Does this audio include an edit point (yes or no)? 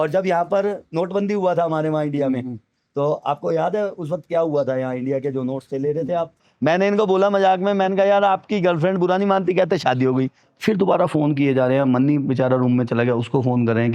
yes